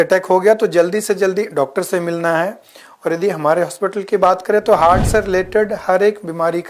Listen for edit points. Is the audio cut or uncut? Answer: uncut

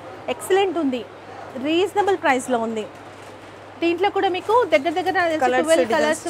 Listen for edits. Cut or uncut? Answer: uncut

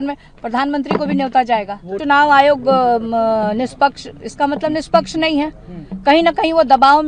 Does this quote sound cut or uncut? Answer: cut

